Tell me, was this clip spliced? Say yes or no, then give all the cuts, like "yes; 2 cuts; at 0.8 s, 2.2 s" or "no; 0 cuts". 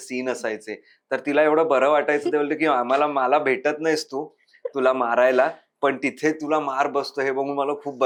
no; 0 cuts